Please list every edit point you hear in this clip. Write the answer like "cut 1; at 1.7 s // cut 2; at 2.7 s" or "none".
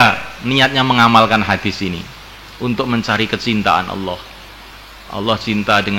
none